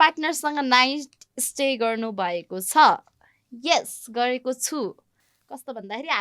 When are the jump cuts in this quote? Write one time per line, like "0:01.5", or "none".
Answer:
none

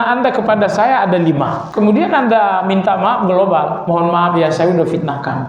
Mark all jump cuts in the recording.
0:01.6

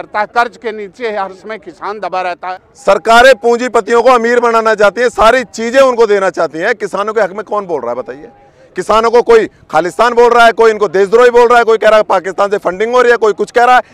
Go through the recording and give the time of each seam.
0:02.4

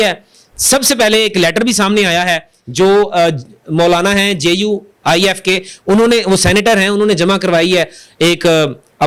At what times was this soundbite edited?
none

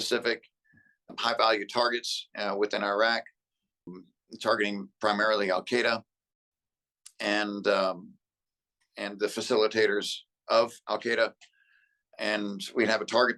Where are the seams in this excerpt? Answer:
0:01.1
0:03.9

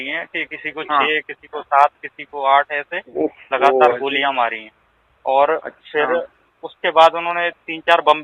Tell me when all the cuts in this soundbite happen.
none

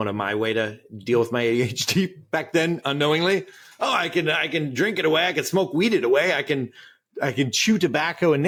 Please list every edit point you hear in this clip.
none

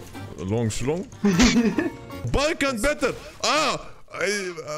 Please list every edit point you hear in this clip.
0:02.1

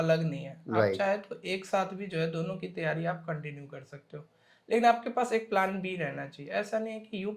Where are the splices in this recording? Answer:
none

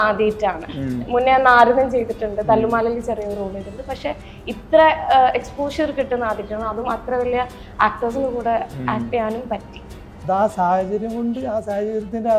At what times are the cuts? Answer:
0:10.3

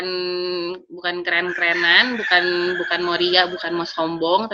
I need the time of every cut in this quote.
none

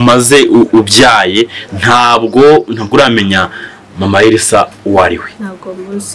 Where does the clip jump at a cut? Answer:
none

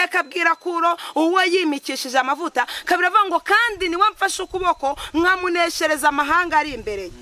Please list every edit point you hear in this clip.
none

